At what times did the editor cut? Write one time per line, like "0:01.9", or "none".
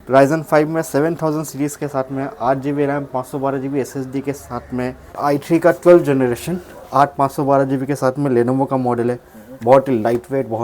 0:05.2